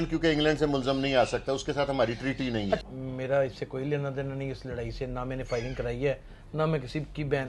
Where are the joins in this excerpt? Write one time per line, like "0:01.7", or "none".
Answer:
0:02.8